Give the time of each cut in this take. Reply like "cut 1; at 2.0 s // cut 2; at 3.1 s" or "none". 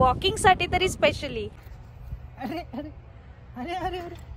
cut 1; at 1.6 s

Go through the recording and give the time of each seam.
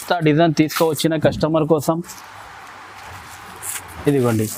none

